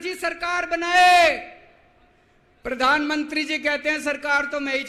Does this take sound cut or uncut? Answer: uncut